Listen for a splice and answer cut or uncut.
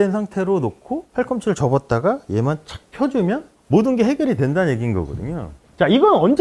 uncut